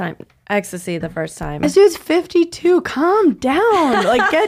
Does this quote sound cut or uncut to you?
uncut